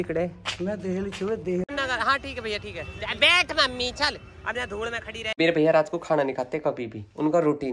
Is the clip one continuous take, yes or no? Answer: no